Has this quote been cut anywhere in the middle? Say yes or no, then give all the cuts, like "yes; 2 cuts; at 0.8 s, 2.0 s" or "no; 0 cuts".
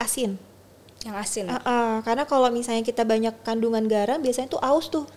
no; 0 cuts